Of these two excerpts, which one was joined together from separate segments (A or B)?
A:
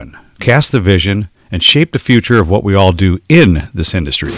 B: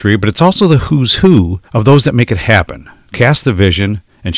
B